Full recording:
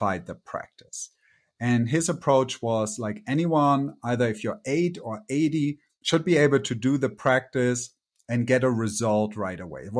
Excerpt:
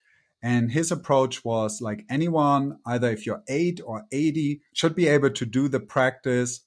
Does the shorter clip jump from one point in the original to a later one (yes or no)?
yes